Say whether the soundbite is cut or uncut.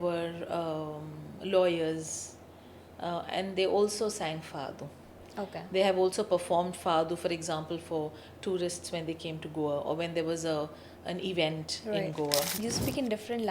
cut